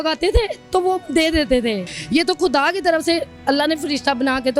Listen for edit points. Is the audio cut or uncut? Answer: cut